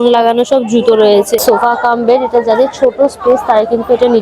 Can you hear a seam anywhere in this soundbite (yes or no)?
yes